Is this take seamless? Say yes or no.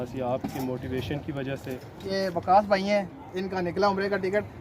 no